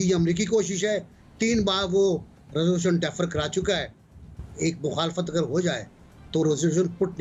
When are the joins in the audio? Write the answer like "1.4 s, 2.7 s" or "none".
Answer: none

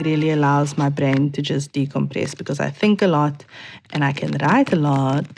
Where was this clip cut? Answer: none

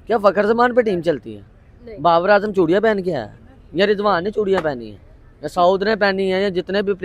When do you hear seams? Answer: none

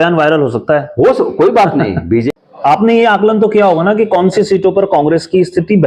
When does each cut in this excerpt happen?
2.2 s

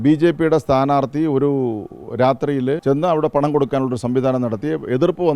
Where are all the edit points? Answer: 2.8 s

